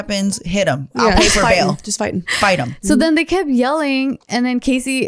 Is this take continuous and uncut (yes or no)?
yes